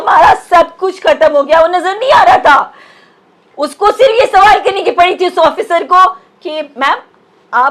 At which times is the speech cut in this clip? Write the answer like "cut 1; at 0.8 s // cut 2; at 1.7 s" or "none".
none